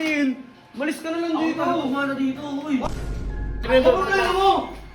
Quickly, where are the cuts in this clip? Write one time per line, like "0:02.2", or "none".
0:03.1